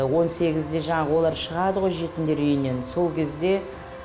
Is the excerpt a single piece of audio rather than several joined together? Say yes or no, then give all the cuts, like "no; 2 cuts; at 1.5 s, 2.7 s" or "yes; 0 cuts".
yes; 0 cuts